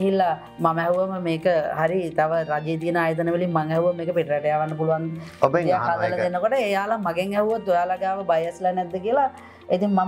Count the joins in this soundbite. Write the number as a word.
zero